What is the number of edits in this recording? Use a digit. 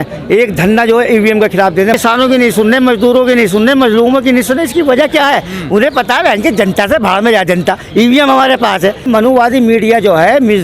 2